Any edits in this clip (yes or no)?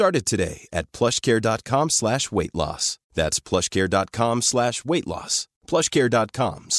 no